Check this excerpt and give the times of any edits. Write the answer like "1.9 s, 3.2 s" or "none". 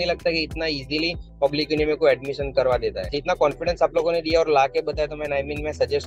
3.1 s